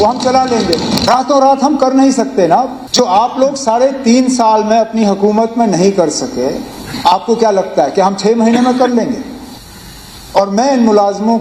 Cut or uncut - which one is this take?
cut